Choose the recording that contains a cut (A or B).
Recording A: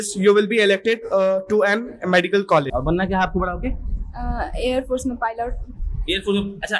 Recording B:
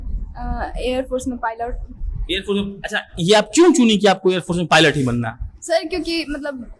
A